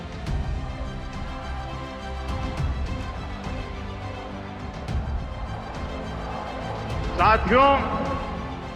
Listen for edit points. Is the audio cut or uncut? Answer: uncut